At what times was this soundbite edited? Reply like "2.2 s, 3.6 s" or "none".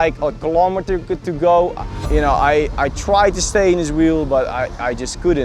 1.8 s